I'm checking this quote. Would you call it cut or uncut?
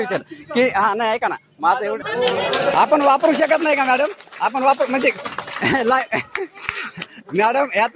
cut